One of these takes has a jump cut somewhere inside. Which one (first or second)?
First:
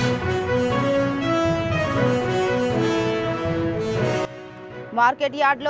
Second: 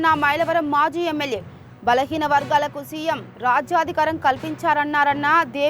first